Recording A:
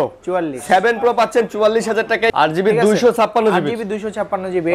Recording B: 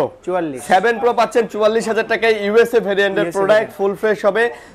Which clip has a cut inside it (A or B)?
A